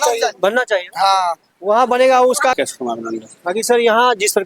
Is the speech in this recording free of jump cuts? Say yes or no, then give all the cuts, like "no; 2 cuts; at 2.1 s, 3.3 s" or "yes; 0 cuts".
no; 1 cut; at 2.6 s